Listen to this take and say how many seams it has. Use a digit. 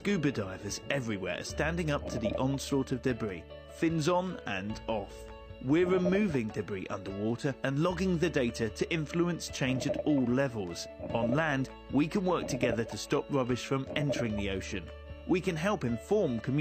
1